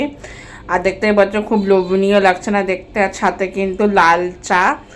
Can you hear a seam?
no; 0 cuts

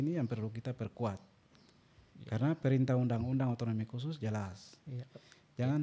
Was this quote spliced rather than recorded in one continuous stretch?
no; 0 cuts

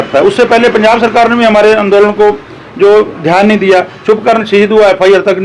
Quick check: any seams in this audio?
no; 0 cuts

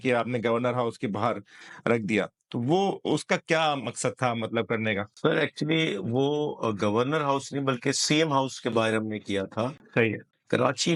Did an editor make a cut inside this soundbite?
no; 0 cuts

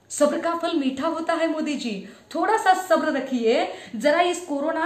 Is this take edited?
no; 0 cuts

